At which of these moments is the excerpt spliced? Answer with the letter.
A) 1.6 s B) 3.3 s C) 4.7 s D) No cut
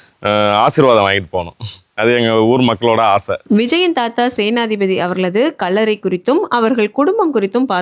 D